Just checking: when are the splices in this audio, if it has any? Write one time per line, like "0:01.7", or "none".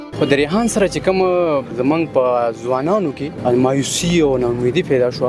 0:01.7
0:03.3